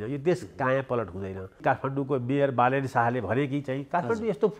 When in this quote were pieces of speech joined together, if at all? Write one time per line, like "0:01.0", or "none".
0:01.6